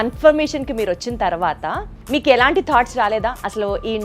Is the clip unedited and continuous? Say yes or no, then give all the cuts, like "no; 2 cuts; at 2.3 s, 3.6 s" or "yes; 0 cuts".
no; 1 cut; at 1.9 s